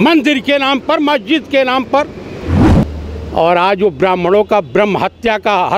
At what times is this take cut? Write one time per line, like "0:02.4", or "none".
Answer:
0:02.6